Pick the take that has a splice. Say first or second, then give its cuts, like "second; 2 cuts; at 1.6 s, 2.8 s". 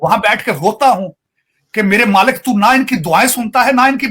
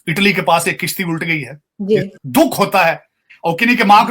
second; 1 cut; at 2.1 s